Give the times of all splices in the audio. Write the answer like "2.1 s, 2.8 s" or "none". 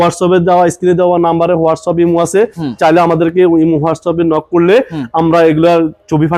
none